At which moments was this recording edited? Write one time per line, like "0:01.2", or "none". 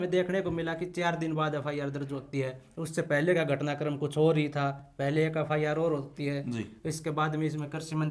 none